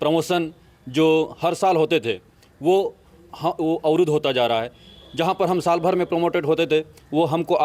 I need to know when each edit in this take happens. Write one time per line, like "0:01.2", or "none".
none